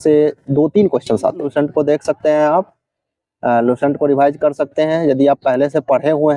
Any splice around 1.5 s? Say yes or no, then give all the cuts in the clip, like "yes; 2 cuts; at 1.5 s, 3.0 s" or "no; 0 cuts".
yes; 1 cut; at 1.5 s